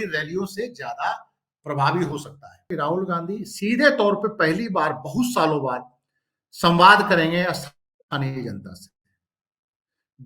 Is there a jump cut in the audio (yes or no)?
yes